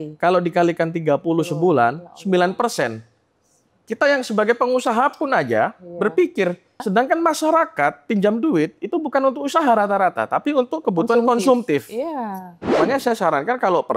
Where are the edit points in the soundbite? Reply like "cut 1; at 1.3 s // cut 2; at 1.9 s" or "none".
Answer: cut 1; at 6.8 s // cut 2; at 12.6 s